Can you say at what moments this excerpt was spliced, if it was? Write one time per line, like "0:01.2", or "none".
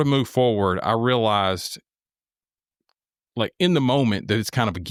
none